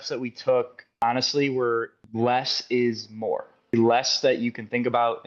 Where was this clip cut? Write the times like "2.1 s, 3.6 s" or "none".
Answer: 1.0 s, 2.0 s, 3.7 s

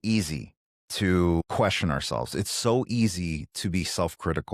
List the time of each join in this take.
1.4 s

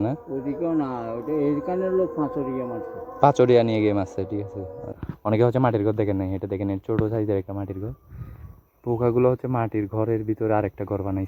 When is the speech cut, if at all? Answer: 4.9 s

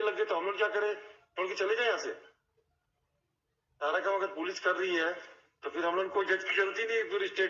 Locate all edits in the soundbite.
none

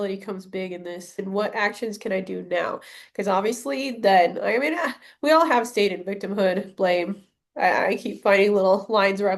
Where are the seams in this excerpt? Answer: 1.2 s

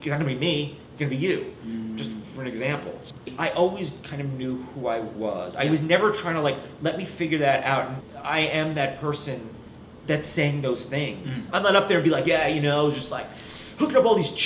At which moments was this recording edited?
3.1 s, 8.0 s

